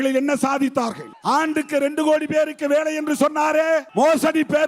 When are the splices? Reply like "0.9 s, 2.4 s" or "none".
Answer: 1.1 s, 3.9 s